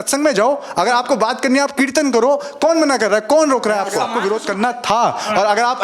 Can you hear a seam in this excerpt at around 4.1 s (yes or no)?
yes